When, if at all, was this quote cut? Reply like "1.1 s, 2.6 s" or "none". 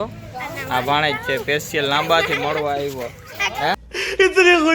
3.7 s